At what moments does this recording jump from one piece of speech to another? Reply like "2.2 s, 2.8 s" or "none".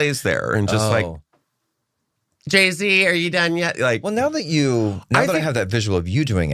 none